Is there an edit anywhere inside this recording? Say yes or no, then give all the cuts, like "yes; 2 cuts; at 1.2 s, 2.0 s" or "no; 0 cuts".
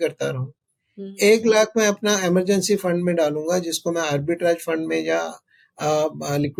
no; 0 cuts